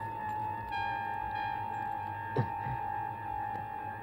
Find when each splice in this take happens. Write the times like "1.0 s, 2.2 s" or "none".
none

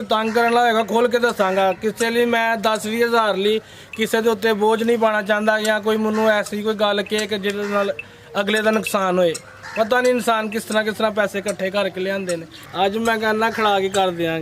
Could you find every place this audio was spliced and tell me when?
12.7 s

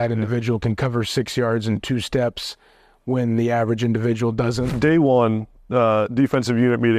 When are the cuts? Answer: 4.7 s

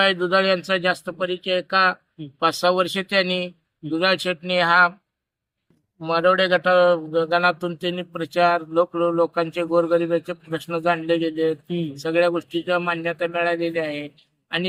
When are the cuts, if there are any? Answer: none

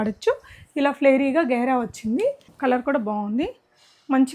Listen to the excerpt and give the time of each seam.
2.5 s

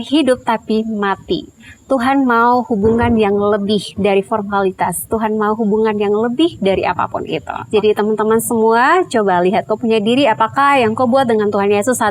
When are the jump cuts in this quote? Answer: 7.5 s

